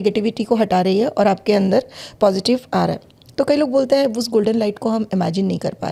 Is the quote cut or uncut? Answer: uncut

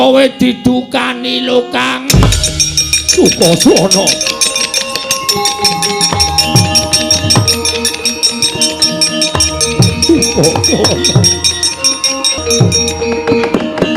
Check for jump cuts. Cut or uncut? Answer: cut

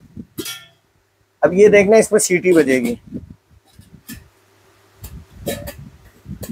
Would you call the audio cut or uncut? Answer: uncut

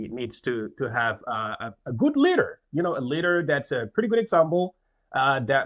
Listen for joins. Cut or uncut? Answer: uncut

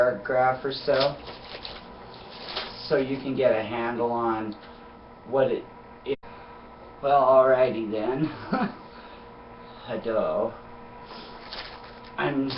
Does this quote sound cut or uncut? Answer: uncut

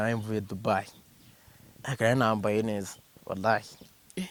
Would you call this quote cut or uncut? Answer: uncut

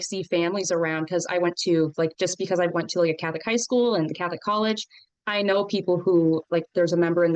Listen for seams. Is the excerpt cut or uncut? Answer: uncut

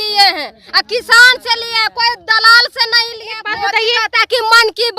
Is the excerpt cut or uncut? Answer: cut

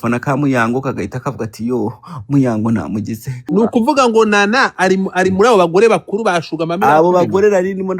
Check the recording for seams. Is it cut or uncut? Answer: cut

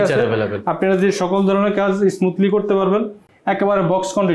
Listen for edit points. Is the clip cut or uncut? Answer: cut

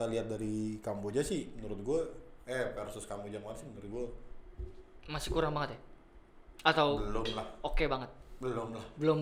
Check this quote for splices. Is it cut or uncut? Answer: uncut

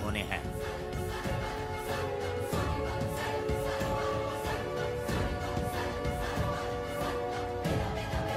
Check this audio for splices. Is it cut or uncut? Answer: uncut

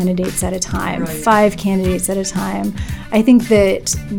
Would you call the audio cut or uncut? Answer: uncut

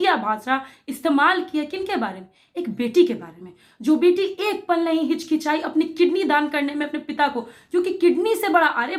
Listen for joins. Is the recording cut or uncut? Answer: uncut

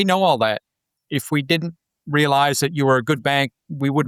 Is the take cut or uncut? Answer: uncut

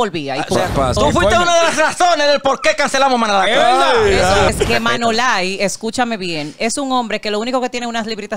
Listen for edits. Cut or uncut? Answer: cut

